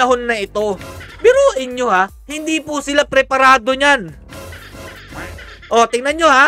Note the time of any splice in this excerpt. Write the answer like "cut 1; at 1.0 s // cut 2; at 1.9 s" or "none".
none